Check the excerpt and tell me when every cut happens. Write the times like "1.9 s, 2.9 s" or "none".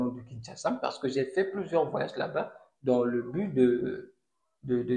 none